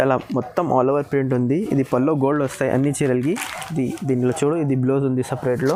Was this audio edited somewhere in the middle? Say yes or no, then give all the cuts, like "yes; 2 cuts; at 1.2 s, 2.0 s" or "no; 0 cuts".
no; 0 cuts